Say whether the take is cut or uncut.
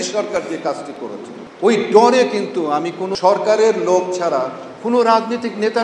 cut